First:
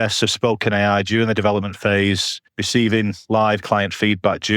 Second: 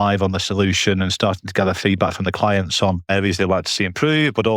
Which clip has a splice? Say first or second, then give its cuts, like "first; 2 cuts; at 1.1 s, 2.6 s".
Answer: second; 1 cut; at 3.1 s